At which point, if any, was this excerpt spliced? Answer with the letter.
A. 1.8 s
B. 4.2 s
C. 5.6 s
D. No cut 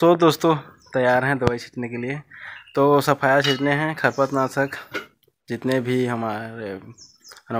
D